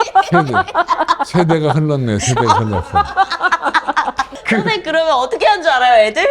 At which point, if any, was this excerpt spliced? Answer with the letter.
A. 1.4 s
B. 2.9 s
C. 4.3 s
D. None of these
C